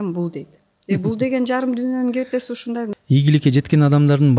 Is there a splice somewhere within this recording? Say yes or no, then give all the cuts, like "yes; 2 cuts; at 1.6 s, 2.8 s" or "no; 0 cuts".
yes; 1 cut; at 2.9 s